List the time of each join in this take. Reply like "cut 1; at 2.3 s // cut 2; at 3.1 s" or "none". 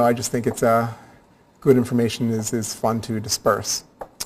cut 1; at 3.3 s